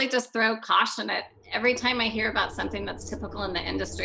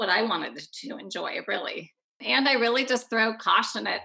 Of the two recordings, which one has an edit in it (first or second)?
second